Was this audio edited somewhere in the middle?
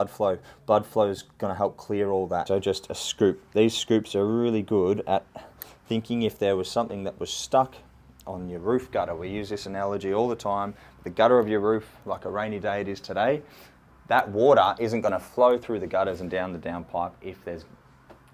yes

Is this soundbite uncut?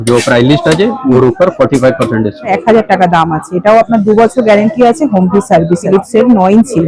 no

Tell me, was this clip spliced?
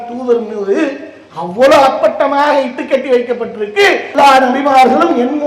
yes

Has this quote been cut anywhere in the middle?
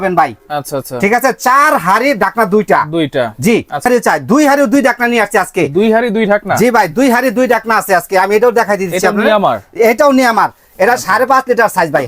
yes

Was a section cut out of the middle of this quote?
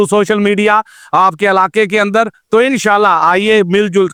no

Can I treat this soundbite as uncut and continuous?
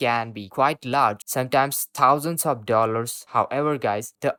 yes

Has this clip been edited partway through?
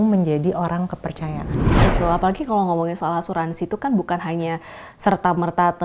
yes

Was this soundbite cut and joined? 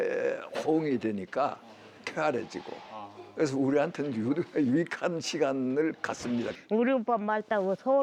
yes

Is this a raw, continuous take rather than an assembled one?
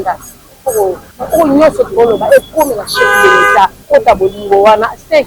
no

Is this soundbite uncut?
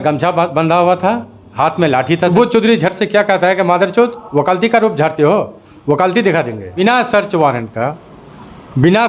no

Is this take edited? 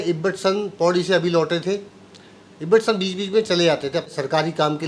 no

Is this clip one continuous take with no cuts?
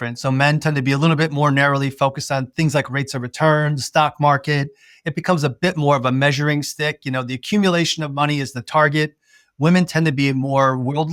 yes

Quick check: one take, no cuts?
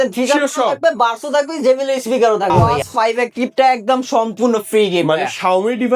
no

